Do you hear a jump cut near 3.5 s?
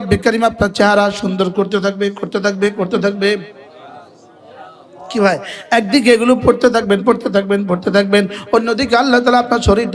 no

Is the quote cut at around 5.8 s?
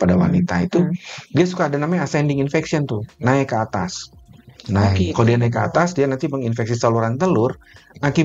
no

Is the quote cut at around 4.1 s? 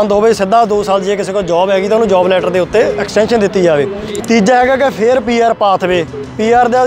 yes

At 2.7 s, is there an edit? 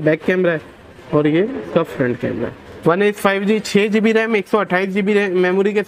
yes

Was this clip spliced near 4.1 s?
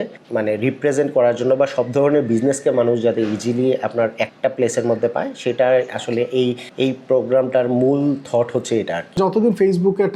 no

